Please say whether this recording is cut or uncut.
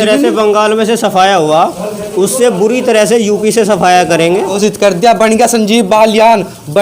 cut